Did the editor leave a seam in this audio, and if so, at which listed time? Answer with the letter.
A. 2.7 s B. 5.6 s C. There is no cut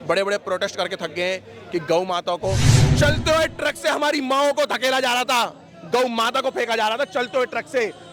A